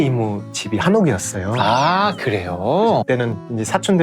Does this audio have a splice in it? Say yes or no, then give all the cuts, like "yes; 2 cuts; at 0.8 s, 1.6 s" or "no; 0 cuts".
yes; 1 cut; at 3.0 s